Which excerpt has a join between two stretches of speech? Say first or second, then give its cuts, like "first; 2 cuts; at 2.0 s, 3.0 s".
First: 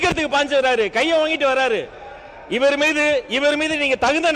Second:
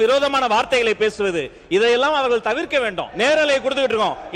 second; 1 cut; at 3.0 s